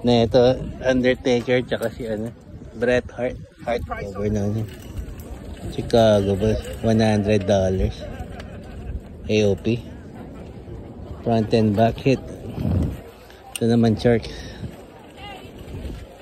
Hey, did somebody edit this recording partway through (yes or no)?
yes